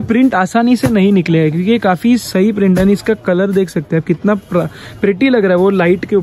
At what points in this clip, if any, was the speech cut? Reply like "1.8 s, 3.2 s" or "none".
none